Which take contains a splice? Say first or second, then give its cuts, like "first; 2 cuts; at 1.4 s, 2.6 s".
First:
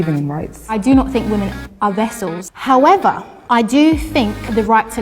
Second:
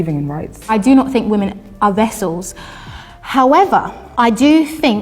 first; 1 cut; at 2.5 s